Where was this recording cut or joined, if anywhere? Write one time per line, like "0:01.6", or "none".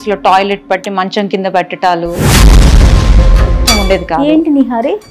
0:03.7